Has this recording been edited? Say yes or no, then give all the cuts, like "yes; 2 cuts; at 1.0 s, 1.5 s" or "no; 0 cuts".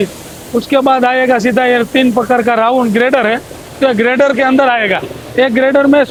no; 0 cuts